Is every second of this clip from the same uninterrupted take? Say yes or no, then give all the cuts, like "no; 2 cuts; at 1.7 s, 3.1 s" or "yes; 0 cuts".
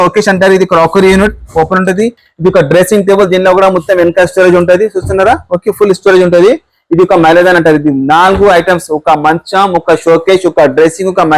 yes; 0 cuts